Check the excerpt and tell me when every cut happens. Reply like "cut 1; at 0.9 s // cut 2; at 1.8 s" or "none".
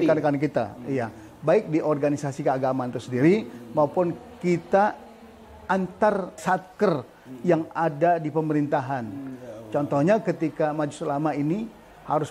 cut 1; at 6.4 s